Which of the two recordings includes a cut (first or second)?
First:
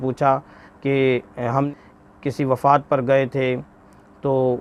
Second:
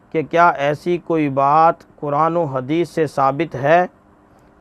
first